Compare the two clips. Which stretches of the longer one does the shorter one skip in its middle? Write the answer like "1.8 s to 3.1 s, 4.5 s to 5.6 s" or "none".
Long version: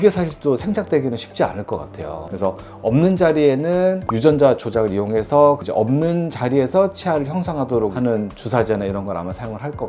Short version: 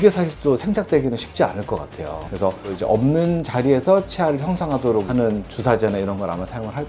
2.8 s to 5.6 s